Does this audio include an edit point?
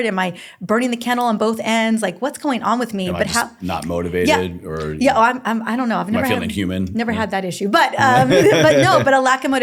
no; 0 cuts

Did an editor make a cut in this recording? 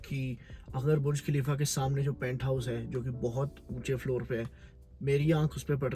no; 0 cuts

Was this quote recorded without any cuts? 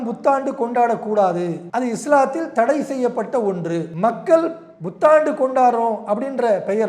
no; 2 cuts; at 1.6 s, 3.9 s

